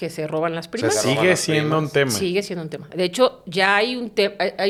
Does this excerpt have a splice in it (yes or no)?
no